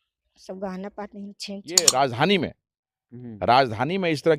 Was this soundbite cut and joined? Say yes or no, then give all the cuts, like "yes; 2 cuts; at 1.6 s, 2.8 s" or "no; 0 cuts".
yes; 1 cut; at 1.8 s